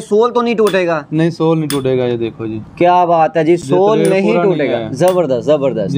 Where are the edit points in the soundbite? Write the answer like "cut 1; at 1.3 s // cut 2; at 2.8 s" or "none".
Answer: none